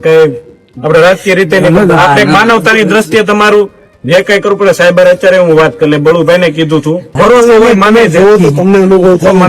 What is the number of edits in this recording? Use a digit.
1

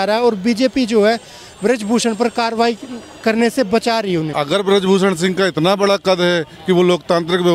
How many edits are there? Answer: 1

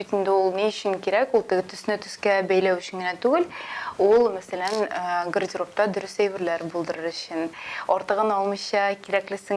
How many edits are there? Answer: 0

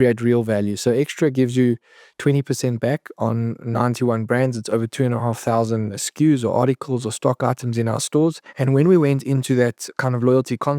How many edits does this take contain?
3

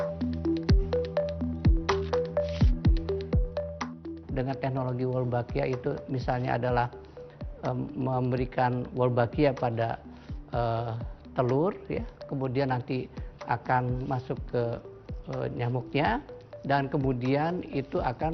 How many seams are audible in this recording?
1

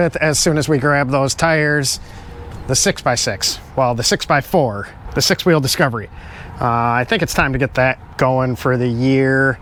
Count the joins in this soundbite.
0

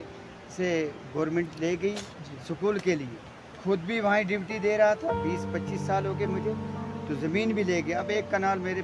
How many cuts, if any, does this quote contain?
0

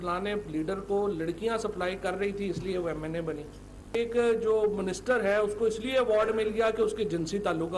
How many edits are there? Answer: 1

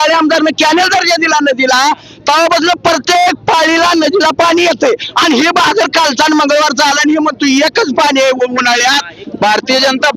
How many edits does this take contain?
1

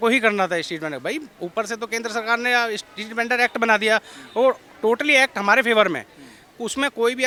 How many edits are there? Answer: 0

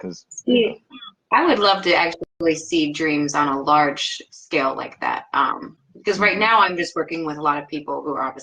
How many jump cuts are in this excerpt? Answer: 0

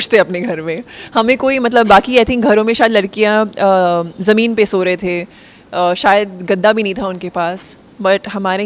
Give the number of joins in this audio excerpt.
0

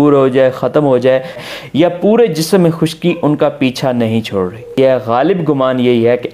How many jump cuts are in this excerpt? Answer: 2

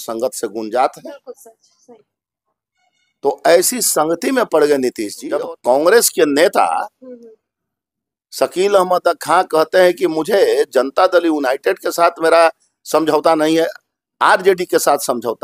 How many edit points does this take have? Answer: 1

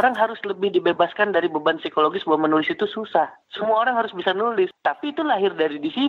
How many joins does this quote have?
1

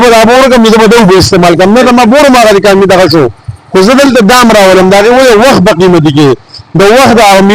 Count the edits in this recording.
0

